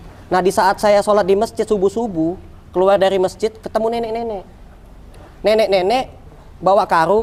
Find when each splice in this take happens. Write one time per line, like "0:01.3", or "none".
none